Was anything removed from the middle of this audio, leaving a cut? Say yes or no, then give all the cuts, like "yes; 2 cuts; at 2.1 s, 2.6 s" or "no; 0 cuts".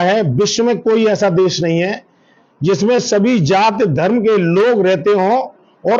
no; 0 cuts